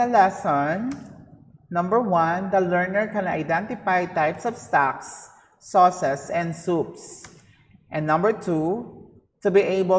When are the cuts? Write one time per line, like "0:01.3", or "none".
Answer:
none